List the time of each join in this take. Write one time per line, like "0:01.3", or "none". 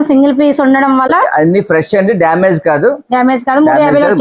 0:01.1